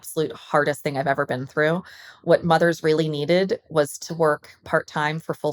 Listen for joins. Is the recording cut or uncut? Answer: uncut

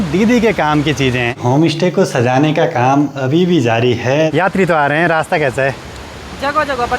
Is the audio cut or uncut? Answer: cut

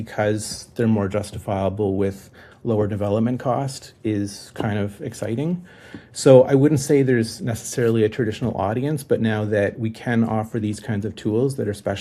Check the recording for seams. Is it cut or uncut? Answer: uncut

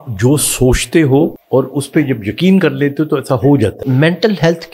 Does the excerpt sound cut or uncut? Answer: cut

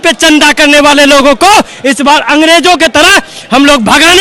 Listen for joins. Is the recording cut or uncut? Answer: uncut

